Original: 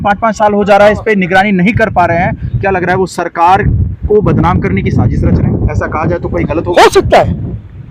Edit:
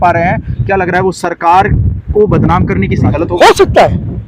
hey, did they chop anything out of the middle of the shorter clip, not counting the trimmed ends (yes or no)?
yes